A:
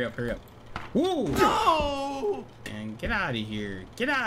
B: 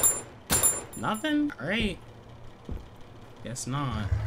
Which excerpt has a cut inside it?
A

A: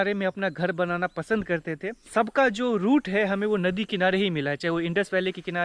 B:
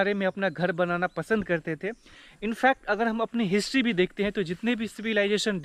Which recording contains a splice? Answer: A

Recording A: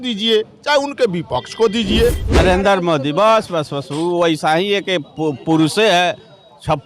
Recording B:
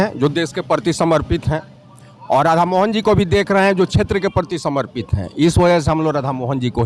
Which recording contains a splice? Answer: A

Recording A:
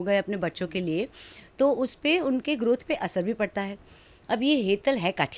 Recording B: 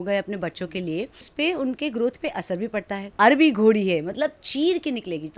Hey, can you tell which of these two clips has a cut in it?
B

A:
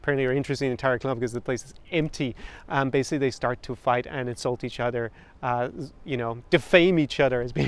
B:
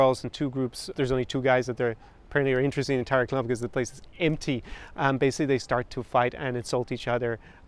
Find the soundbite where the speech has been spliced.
B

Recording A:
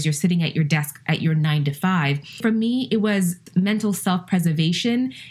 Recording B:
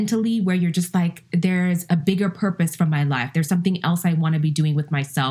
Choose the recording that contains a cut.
A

